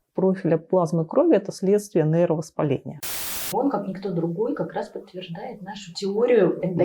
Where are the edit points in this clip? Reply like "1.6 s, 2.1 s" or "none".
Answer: 2.9 s